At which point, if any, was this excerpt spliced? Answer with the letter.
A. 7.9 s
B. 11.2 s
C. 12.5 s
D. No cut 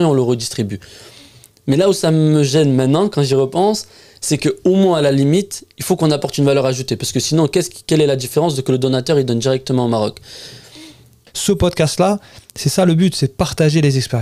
B